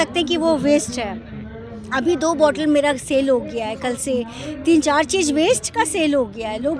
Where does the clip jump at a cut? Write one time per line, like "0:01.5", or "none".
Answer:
none